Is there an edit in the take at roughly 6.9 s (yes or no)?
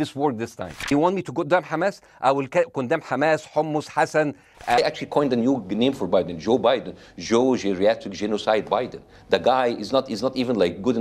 no